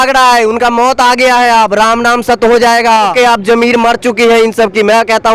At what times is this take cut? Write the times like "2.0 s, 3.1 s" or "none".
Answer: 3.1 s